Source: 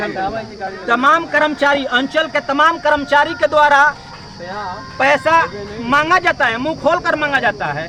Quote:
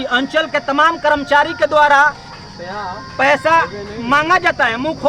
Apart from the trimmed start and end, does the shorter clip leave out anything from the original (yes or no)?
no